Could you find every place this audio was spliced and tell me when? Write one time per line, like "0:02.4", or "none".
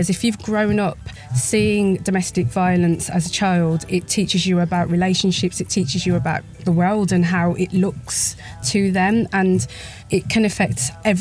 0:05.6
0:06.5
0:08.6
0:10.2